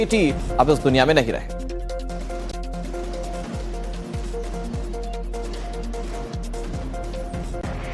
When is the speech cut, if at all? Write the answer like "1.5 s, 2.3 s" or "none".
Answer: none

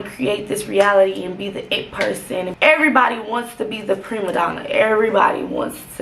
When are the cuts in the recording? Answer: 2.5 s

